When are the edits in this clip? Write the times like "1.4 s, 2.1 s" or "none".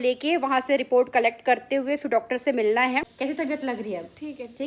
3.1 s